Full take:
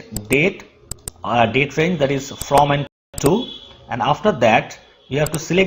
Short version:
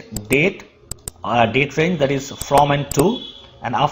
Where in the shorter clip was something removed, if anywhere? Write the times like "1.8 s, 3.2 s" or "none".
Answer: 2.9 s